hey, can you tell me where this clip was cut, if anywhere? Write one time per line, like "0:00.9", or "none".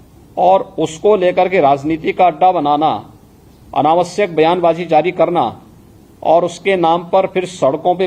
none